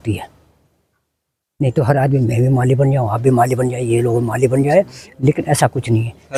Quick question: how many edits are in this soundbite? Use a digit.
0